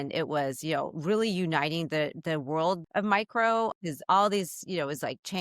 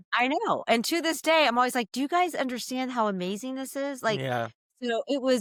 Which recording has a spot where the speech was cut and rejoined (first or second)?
first